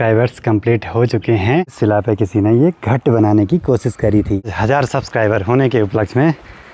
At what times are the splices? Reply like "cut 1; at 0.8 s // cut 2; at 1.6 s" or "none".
cut 1; at 1.7 s // cut 2; at 4.6 s